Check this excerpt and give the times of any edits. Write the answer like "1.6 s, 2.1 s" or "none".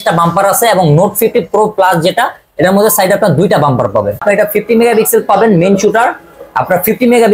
4.2 s